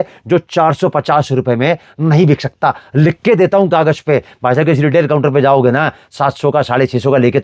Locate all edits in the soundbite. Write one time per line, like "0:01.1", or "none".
none